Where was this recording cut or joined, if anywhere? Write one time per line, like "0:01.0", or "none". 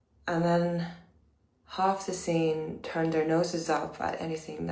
0:01.0